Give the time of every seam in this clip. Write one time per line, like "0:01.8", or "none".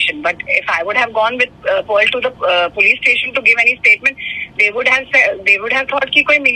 none